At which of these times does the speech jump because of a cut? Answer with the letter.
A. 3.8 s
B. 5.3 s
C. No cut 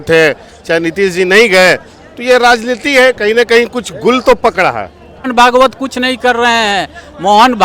B